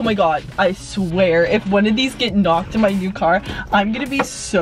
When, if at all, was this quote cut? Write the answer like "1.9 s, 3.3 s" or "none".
none